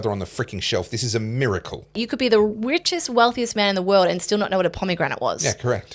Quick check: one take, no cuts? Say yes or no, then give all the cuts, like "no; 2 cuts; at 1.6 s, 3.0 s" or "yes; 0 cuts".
no; 1 cut; at 2.0 s